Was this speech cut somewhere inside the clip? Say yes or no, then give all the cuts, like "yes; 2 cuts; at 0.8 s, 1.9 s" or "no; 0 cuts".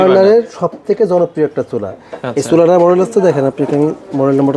no; 0 cuts